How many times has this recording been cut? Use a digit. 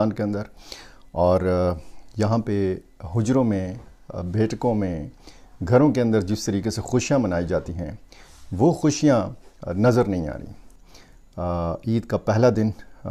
0